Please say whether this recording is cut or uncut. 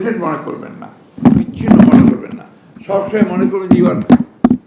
uncut